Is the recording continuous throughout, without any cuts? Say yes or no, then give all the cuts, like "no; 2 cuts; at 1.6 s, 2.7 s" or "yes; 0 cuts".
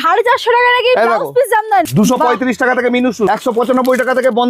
no; 2 cuts; at 1.9 s, 3.3 s